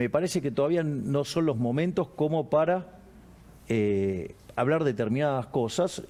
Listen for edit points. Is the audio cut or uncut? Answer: uncut